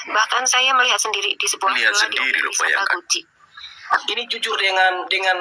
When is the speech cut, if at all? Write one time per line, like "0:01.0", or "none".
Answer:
0:03.9